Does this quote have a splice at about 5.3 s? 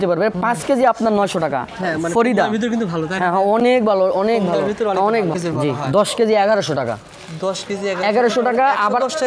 yes; 1 cut; at 5.3 s

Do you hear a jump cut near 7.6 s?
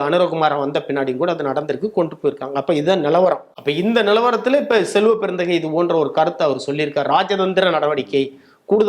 no; 1 cut; at 3.5 s

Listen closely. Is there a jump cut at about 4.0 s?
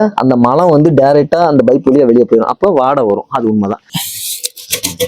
yes; 1 cut; at 4.0 s

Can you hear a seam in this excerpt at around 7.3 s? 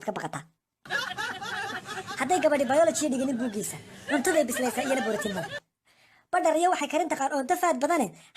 yes; 1 cut; at 7.3 s

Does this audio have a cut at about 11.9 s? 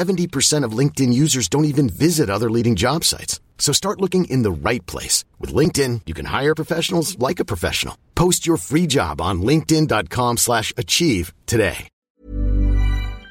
yes; 1 cut; at 11.9 s

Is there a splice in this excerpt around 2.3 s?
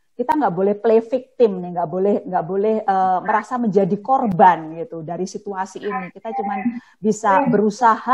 no; 0 cuts

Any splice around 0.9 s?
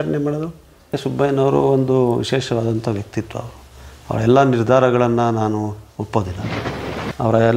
yes; 1 cut; at 0.9 s

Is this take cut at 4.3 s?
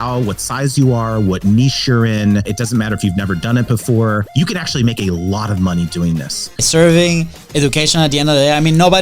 yes; 3 cuts; at 2.5 s, 4.3 s, 6.6 s

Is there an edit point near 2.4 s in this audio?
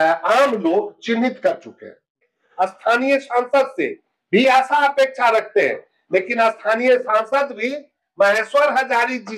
yes; 1 cut; at 2.4 s

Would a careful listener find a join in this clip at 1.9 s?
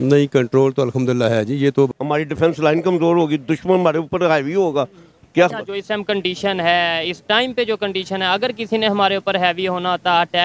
yes; 1 cut; at 1.9 s

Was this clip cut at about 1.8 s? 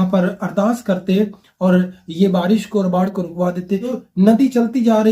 no; 1 cut; at 3.9 s

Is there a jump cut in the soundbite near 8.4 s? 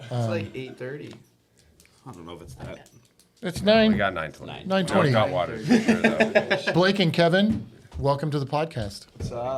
no; 1 cut; at 6.7 s

